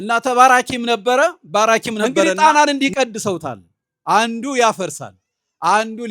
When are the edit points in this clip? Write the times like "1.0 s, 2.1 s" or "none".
2.3 s